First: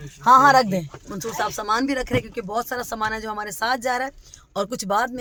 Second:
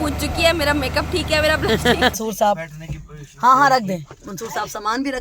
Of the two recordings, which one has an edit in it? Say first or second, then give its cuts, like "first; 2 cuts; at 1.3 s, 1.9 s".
second; 1 cut; at 2.1 s